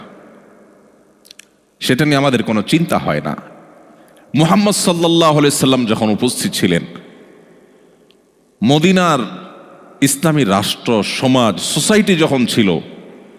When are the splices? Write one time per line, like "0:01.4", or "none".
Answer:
none